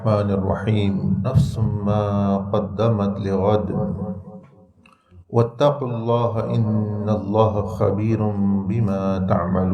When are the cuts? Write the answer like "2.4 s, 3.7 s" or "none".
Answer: 1.2 s